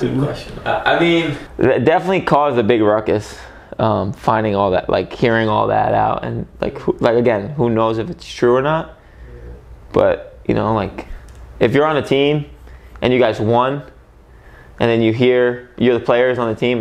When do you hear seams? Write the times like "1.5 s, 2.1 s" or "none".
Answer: 1.4 s